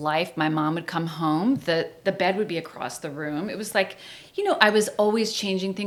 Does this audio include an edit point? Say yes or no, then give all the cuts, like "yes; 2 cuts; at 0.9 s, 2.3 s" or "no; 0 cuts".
no; 0 cuts